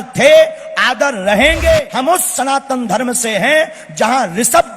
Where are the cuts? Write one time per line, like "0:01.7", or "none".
0:01.9